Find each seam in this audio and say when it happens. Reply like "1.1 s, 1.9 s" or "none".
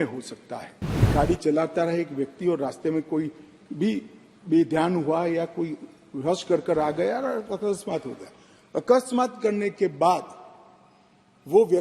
1.1 s